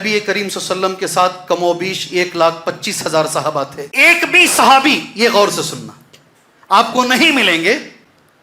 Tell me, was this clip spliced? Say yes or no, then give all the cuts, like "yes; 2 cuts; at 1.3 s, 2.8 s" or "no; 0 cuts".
yes; 1 cut; at 3.8 s